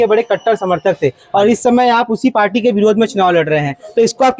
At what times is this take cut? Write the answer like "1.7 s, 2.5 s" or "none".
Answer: none